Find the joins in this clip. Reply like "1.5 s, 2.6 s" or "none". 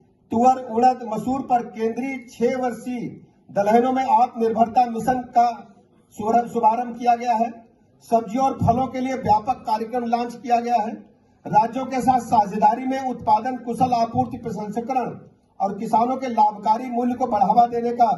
none